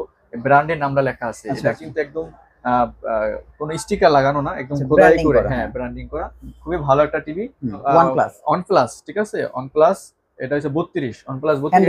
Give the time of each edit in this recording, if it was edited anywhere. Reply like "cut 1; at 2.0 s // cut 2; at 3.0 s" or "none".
cut 1; at 7.8 s